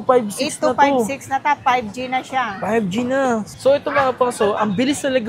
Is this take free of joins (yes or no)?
no